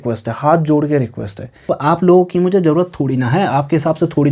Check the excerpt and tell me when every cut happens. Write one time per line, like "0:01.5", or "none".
0:01.7